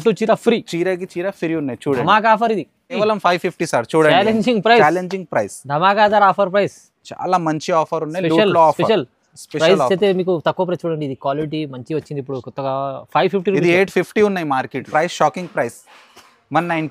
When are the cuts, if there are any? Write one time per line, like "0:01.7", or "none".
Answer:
0:03.0
0:14.9